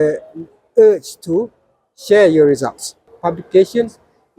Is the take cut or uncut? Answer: cut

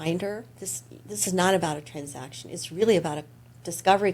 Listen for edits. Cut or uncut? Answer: uncut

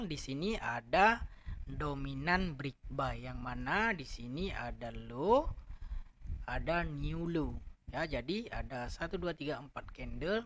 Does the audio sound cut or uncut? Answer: uncut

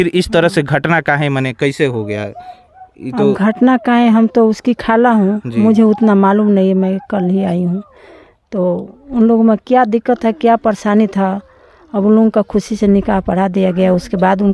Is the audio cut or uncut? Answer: uncut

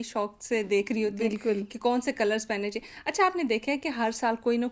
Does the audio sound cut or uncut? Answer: uncut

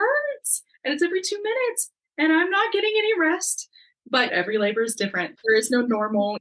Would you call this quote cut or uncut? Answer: cut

